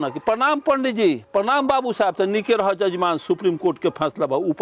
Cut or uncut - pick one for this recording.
uncut